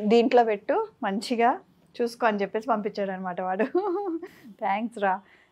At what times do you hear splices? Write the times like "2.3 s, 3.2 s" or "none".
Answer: none